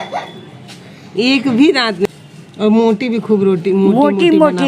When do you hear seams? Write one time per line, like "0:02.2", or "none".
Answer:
0:02.1